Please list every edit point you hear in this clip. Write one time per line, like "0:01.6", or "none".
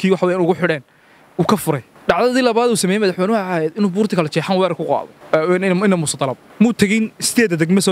0:01.9
0:05.1
0:06.4